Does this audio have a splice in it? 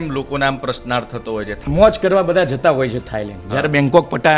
yes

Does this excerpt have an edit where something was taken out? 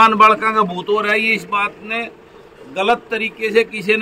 no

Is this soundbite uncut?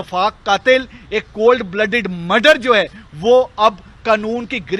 yes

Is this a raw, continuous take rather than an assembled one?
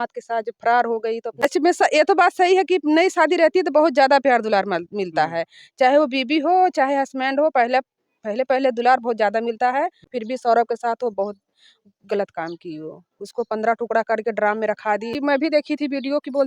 no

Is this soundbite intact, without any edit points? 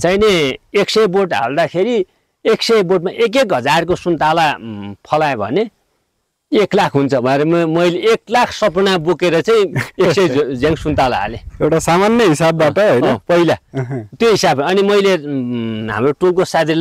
yes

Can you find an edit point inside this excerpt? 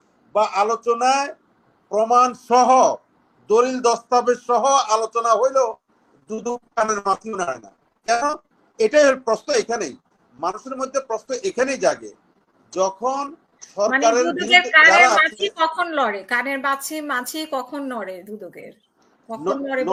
no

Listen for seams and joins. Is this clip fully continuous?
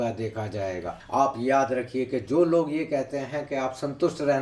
no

